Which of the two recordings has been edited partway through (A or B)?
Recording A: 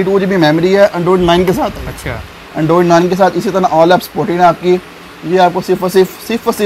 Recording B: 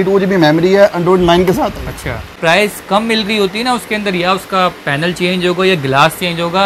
B